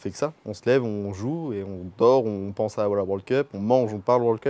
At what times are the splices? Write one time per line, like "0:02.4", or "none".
none